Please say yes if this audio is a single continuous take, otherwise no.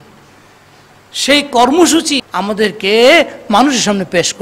no